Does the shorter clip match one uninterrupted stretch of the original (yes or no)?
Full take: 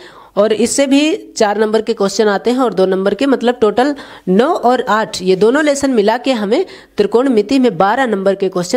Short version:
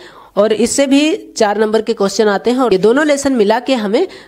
no